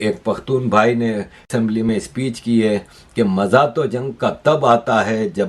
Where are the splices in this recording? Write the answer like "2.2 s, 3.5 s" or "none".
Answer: 1.5 s